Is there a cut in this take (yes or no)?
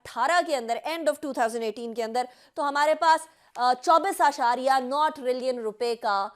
no